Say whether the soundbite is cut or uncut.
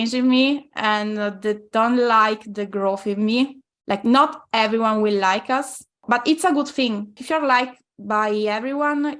cut